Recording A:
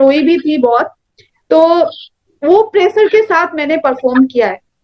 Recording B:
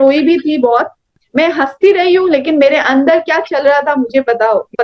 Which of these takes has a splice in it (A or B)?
B